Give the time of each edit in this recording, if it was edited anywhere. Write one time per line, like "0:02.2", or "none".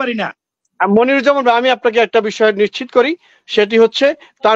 none